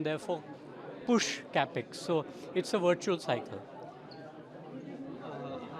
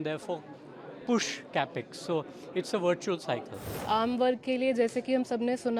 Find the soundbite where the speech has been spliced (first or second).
second